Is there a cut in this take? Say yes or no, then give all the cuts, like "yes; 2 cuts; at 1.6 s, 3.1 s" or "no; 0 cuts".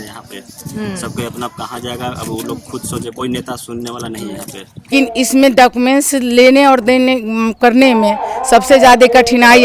yes; 1 cut; at 4.9 s